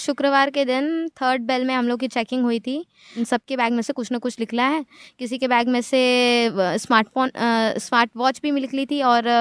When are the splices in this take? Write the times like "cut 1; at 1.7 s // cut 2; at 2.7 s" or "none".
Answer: cut 1; at 3.1 s